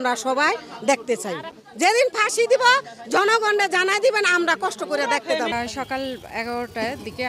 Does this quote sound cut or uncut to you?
uncut